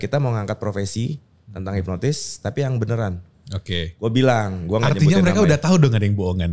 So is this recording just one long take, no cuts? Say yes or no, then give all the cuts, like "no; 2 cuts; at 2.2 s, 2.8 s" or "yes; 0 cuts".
yes; 0 cuts